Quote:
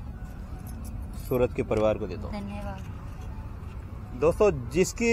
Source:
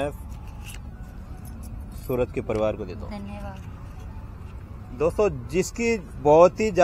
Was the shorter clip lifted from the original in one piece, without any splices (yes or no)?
yes